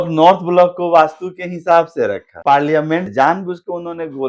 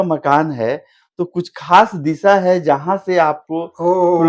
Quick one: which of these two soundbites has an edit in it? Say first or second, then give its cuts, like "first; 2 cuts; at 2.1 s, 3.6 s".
first; 2 cuts; at 2.3 s, 3.1 s